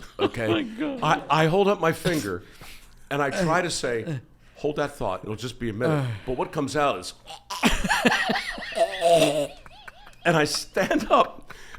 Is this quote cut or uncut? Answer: cut